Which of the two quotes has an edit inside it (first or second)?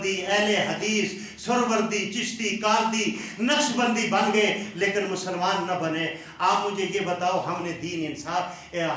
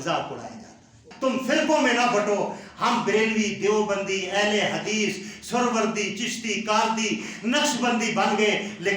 second